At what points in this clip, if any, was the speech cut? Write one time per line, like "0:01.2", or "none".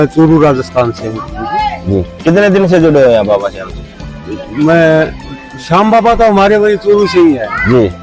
none